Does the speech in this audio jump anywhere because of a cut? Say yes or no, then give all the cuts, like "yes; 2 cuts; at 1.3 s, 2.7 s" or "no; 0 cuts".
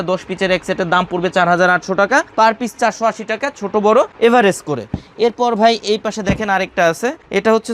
no; 0 cuts